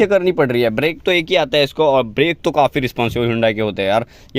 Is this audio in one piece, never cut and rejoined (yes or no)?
yes